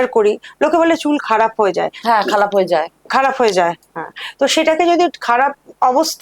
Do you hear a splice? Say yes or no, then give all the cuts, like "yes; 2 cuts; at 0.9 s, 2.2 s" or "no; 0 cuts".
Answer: no; 0 cuts